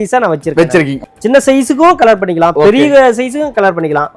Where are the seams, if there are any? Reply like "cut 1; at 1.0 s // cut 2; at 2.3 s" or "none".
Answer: cut 1; at 1.0 s